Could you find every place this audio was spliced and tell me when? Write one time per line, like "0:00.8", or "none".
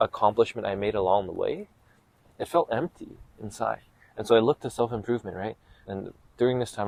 none

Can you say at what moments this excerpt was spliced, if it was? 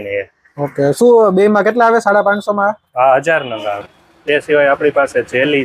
0:04.0

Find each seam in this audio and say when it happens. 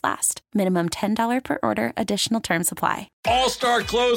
0:03.1

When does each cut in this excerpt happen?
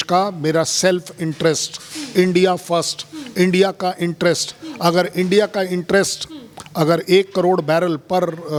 none

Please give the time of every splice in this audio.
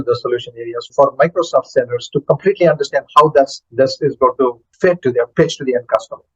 0:00.9
0:04.9

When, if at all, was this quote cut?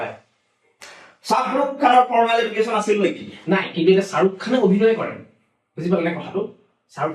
none

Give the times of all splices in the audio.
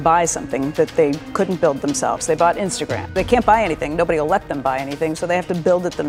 0:03.1

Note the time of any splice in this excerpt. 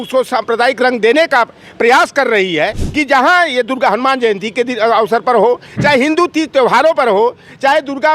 0:02.8

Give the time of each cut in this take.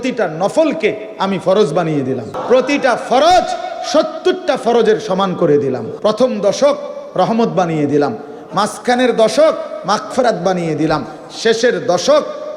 0:02.3
0:05.9

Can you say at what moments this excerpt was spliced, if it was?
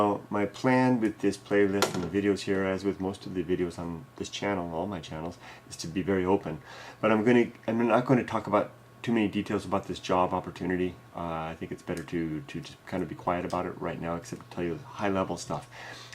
0:12.8

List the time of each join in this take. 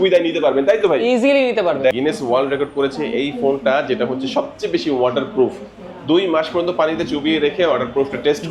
0:01.9

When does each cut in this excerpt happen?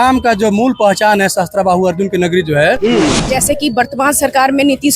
0:03.2

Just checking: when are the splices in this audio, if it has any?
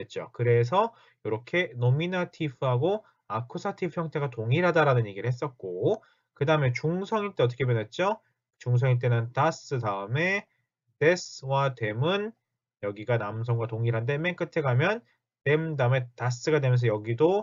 none

